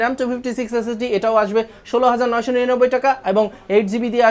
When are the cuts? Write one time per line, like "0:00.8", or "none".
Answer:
none